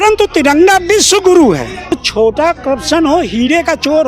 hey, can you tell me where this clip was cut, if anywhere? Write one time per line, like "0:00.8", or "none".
0:01.9